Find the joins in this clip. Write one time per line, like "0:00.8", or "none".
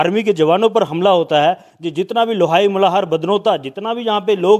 none